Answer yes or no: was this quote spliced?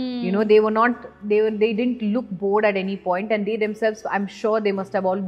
no